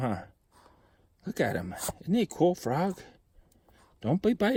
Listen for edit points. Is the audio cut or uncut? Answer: uncut